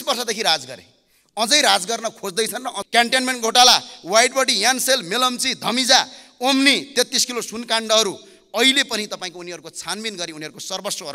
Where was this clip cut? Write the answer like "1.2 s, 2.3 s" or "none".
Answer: 2.7 s